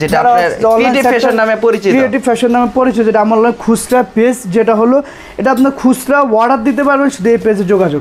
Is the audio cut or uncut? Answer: uncut